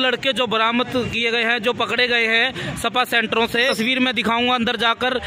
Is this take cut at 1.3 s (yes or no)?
no